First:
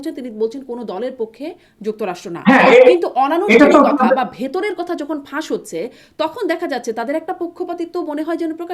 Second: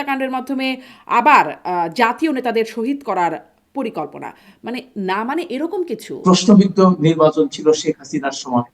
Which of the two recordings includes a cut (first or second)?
second